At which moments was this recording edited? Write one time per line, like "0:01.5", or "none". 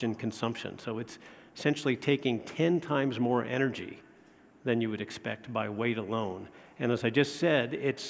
0:06.4